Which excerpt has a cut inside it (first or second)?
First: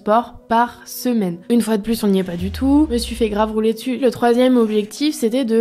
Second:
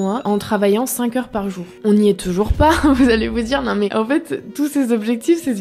first